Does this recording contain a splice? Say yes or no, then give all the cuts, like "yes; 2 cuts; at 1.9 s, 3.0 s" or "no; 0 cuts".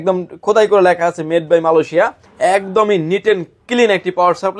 yes; 1 cut; at 2.2 s